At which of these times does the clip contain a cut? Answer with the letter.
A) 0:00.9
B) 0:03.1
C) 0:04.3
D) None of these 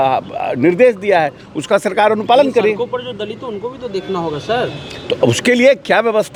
D